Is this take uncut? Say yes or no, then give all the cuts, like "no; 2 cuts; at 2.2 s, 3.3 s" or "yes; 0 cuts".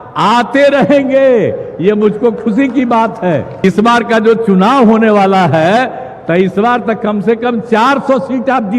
no; 1 cut; at 3.6 s